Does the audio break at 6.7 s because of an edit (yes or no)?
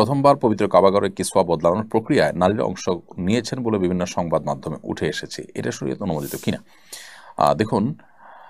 no